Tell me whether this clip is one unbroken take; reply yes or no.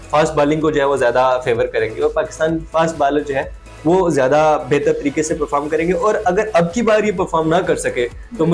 yes